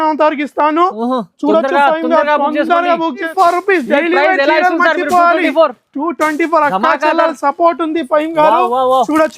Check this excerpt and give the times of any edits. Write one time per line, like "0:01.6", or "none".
0:03.3